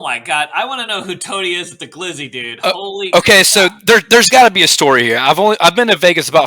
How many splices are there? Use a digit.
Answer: 0